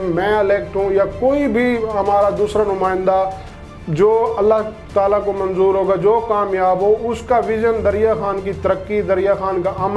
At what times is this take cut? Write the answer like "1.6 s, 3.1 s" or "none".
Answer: none